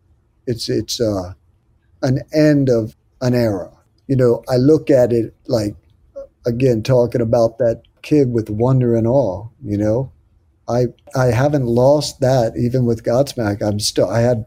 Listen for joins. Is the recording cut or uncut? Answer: cut